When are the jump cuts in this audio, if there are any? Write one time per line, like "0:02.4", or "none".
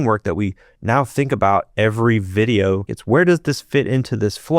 0:02.9

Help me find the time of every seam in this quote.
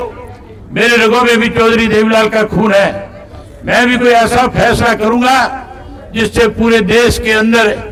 none

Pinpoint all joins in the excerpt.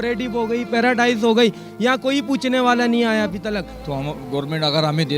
0:03.7

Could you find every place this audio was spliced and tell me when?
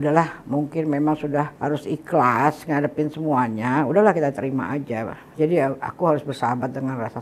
0:01.5

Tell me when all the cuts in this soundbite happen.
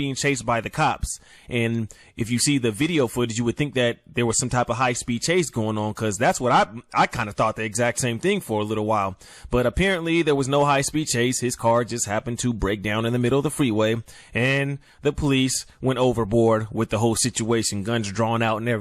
none

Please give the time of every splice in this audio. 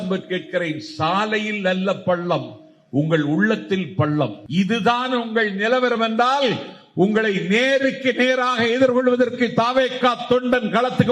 0:04.4

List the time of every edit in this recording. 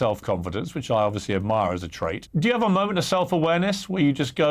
0:02.2

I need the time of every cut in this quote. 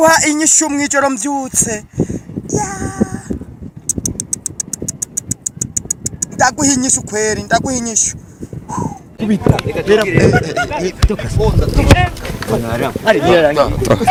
none

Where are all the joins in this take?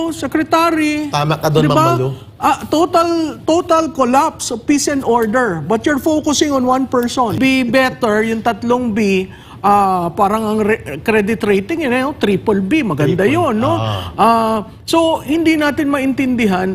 0:07.3

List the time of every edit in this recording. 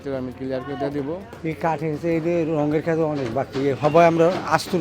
0:01.3

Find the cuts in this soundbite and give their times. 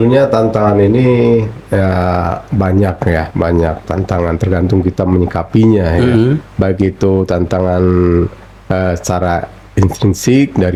none

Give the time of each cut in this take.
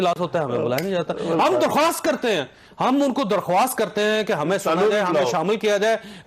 none

